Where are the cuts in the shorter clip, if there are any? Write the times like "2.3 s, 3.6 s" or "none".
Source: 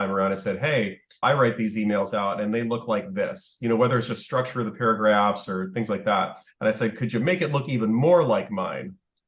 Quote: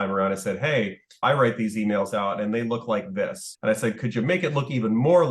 3.5 s

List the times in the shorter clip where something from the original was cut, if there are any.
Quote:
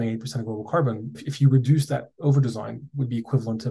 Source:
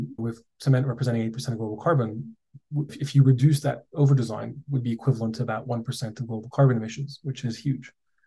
1.2 s

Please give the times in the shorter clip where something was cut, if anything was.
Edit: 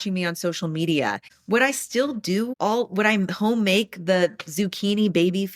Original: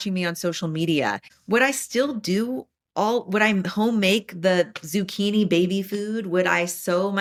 2.5 s

